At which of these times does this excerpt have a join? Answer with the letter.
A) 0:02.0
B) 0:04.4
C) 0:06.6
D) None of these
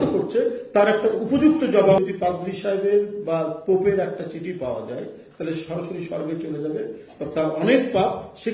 A